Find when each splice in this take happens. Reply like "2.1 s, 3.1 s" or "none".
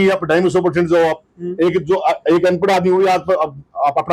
none

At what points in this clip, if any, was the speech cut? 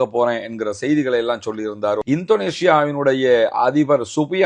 2.0 s

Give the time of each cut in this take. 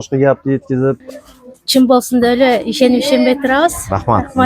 1.0 s

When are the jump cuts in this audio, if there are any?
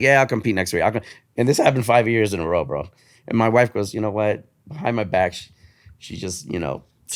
none

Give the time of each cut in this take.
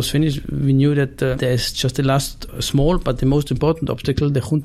1.4 s, 2.4 s

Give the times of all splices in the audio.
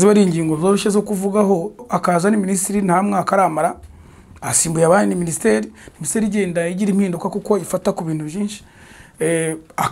1.9 s

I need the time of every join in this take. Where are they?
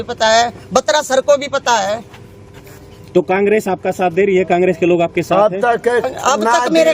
none

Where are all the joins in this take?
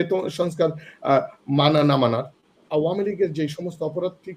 2.6 s

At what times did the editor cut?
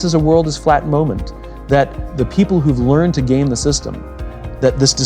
2.1 s

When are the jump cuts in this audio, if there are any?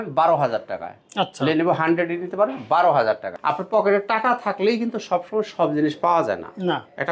3.3 s

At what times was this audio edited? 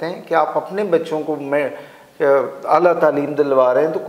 none

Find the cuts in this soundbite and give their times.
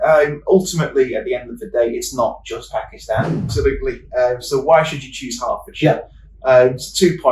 3.5 s

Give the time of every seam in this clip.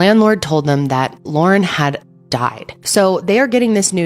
2.7 s

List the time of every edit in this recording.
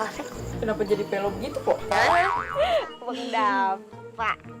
2.5 s

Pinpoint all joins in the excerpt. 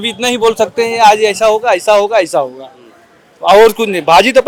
none

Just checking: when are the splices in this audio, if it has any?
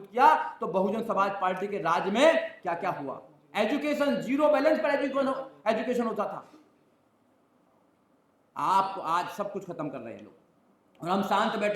none

